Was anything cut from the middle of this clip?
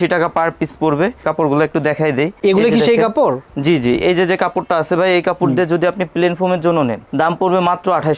no; 0 cuts

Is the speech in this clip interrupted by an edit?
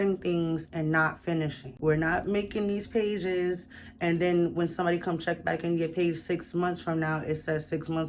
yes; 1 cut; at 1.6 s

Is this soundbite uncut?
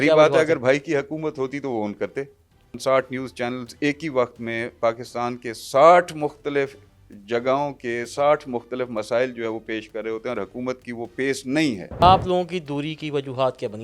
no; 2 cuts; at 2.8 s, 12.0 s

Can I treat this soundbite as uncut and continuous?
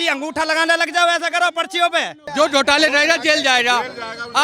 no; 1 cut; at 2.2 s

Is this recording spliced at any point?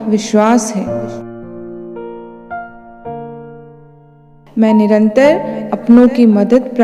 yes; 2 cuts; at 0.9 s, 4.4 s

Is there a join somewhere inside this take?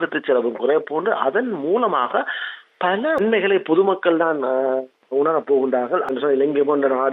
yes; 2 cuts; at 3.2 s, 6.1 s

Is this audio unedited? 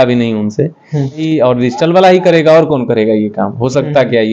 no; 1 cut; at 1.2 s

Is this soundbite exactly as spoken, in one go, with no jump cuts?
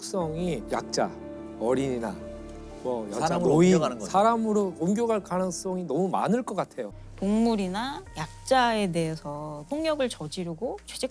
no; 1 cut; at 7.0 s

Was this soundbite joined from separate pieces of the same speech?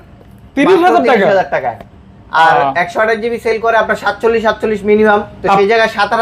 no; 0 cuts

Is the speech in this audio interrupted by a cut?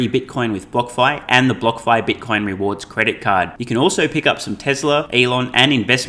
yes; 1 cut; at 5.1 s

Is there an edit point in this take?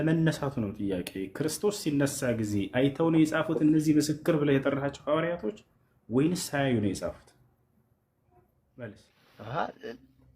yes; 1 cut; at 9.2 s

